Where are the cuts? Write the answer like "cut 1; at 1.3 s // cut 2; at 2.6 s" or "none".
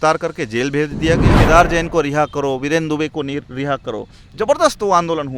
cut 1; at 1.3 s